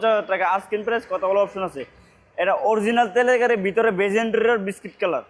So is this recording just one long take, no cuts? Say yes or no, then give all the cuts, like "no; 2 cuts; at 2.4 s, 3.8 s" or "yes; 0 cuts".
yes; 0 cuts